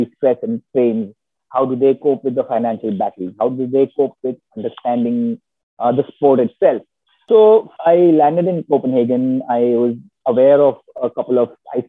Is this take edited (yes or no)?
yes